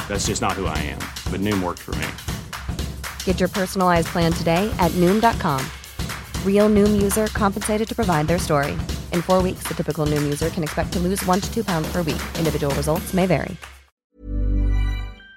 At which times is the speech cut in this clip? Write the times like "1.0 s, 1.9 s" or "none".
14.1 s